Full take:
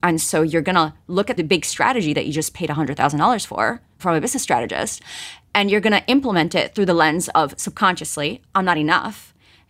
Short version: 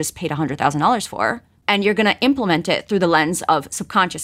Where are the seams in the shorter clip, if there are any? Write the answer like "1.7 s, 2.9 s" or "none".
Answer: 1.5 s